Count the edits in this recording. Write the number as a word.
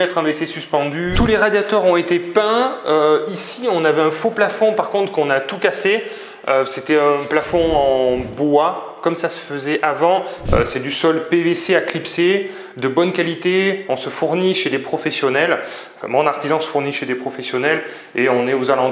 two